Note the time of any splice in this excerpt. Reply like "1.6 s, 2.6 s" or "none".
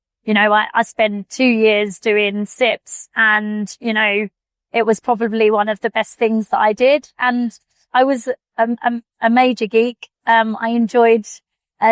none